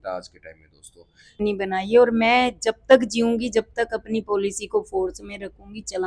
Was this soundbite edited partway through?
yes; 1 cut; at 1.4 s

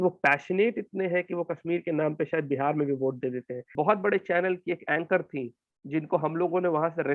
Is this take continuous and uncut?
no; 1 cut; at 3.7 s

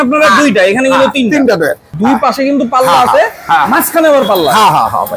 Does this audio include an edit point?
yes; 1 cut; at 1.9 s

